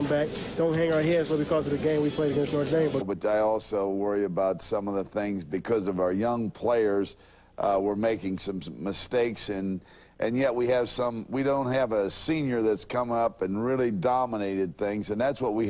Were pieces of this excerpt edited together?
no; 0 cuts

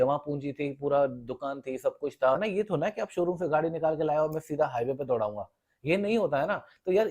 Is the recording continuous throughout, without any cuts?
no; 1 cut; at 2.4 s

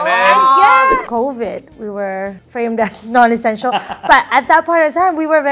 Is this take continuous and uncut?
no; 2 cuts; at 1.1 s, 2.4 s

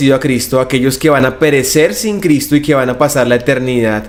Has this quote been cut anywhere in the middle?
no; 0 cuts

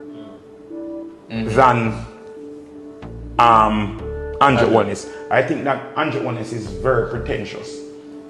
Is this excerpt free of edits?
no; 1 cut; at 5.1 s

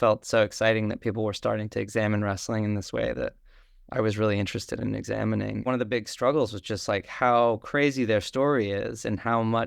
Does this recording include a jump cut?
yes; 1 cut; at 5.7 s

